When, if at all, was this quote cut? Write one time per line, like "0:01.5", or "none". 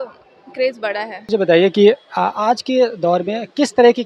0:01.3